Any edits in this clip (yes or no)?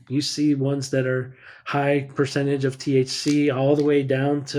no